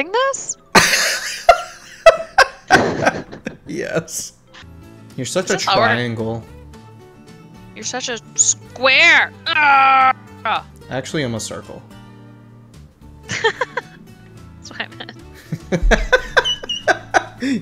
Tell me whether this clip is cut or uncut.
cut